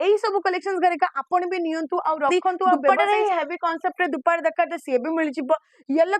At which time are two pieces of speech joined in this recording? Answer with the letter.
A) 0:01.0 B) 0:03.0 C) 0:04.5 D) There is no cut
B